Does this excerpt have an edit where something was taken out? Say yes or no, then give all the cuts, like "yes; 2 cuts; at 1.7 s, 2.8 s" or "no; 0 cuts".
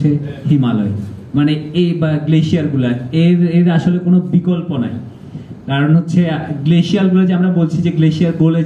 no; 0 cuts